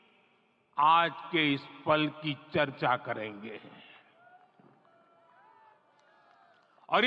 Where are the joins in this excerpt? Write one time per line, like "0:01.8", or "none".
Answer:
none